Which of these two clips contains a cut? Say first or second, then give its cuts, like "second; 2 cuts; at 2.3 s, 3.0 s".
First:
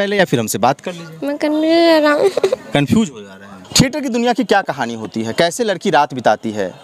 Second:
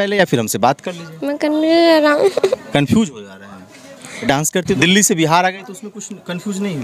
first; 1 cut; at 3.7 s